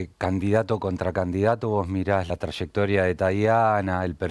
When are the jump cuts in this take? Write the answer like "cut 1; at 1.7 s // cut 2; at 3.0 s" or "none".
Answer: cut 1; at 2.3 s